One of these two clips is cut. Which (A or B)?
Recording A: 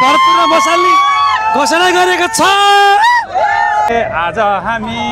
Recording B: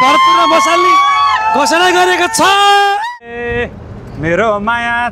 B